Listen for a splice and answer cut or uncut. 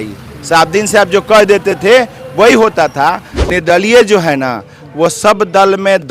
cut